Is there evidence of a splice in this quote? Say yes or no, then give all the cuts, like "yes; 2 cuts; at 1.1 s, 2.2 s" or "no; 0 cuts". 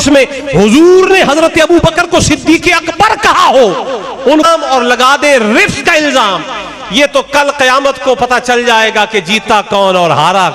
yes; 1 cut; at 4.5 s